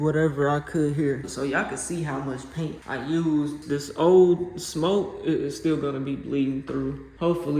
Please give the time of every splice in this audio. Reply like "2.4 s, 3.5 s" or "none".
1.3 s, 2.8 s